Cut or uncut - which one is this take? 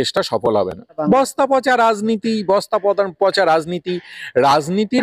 cut